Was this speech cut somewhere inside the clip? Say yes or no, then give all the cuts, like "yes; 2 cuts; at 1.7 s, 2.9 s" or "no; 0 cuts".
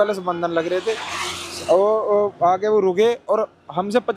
no; 0 cuts